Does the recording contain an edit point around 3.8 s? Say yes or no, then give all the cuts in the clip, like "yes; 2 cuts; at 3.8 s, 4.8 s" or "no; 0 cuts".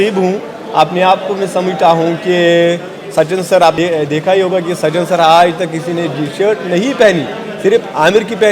yes; 1 cut; at 3.8 s